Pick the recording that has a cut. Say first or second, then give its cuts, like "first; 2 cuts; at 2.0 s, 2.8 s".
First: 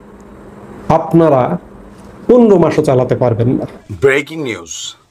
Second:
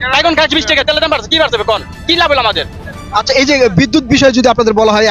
first; 1 cut; at 3.8 s